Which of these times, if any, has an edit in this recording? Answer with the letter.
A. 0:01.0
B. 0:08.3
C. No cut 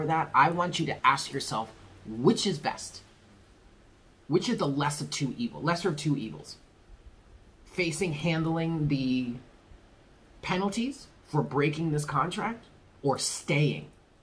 A